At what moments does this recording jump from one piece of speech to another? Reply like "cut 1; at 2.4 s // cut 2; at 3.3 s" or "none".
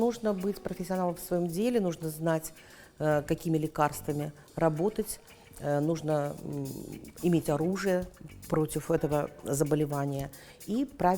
none